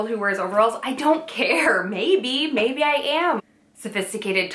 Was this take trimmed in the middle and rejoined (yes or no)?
yes